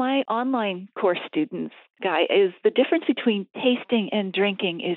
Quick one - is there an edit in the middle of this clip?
no; 0 cuts

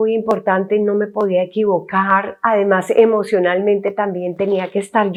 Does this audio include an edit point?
no; 0 cuts

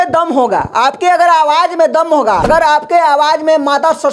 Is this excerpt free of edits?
no; 1 cut; at 2.4 s

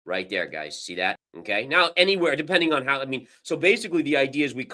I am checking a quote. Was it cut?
yes; 1 cut; at 1.3 s

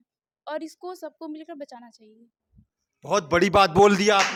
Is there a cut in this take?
no; 0 cuts

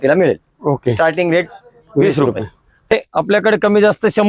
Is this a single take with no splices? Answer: no; 1 cut; at 2.9 s

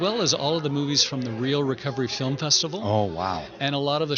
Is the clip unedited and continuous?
yes; 0 cuts

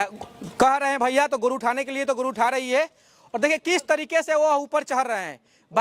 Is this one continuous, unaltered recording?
yes; 0 cuts

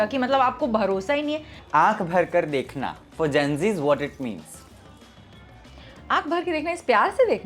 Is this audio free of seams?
no; 1 cut; at 1.6 s

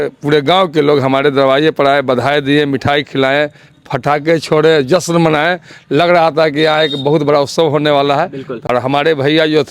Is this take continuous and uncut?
no; 1 cut; at 8.6 s

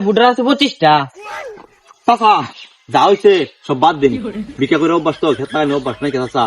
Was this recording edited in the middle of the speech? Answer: yes; 1 cut; at 1.3 s

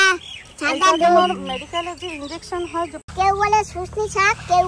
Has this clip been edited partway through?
yes; 1 cut; at 3.0 s

